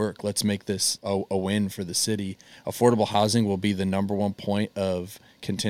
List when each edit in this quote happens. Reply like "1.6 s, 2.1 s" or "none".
0.9 s